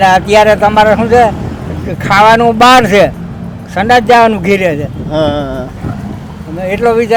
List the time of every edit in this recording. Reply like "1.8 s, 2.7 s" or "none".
none

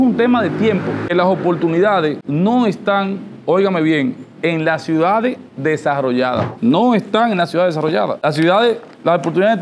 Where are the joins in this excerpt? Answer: 1.1 s

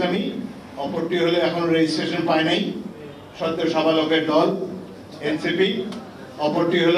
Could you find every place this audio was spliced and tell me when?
none

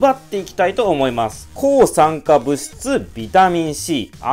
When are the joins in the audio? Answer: 1.5 s

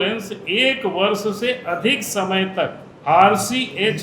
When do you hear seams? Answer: 2.9 s

